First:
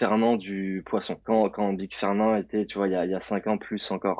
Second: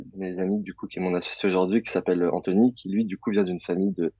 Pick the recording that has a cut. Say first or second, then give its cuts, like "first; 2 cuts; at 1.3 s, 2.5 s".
first; 1 cut; at 1.1 s